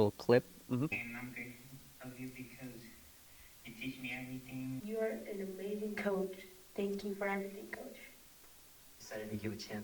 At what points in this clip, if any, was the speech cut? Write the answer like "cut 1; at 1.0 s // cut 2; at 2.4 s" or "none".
cut 1; at 0.9 s // cut 2; at 4.8 s // cut 3; at 8.9 s